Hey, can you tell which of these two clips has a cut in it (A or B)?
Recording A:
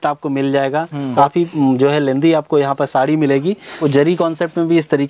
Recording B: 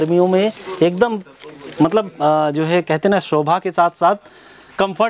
A